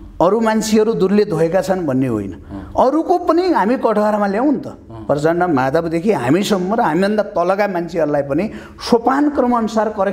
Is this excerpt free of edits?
yes; 0 cuts

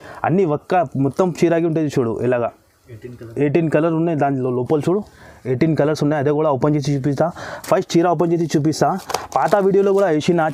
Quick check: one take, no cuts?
yes; 0 cuts

